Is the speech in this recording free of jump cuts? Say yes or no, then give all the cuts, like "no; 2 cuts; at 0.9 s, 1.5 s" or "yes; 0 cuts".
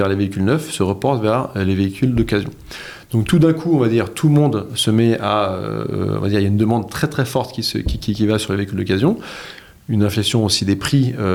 yes; 0 cuts